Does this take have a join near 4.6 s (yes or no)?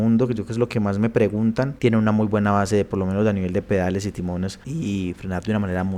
yes